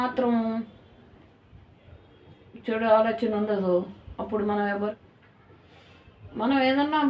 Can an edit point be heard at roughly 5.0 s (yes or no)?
yes